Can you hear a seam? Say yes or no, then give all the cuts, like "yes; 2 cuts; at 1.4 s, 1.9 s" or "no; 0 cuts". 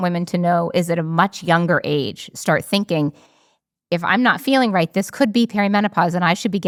no; 0 cuts